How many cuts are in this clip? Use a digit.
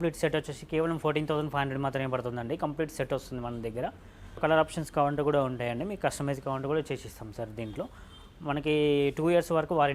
0